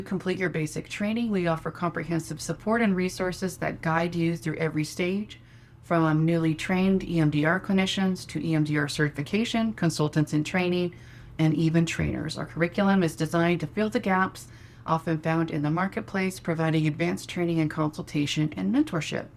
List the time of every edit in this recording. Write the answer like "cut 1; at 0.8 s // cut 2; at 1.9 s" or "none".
none